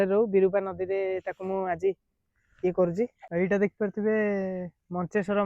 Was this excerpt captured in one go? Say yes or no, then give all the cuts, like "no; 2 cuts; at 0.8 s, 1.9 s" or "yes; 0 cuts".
no; 1 cut; at 3.2 s